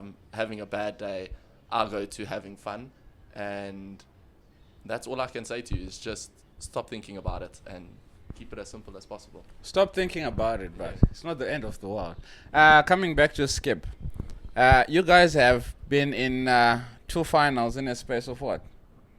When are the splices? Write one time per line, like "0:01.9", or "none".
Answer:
none

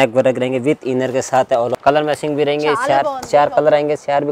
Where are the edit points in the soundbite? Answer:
0:01.7

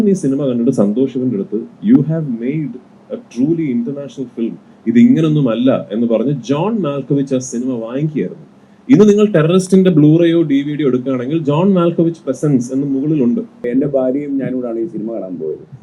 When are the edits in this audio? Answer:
0:13.6

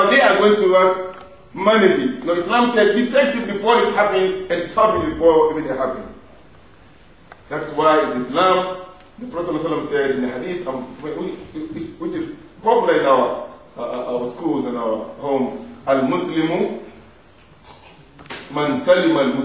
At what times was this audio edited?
0:02.2

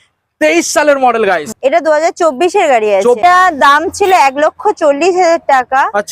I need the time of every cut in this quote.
0:01.5
0:03.2

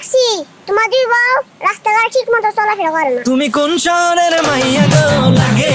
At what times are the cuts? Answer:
0:03.2

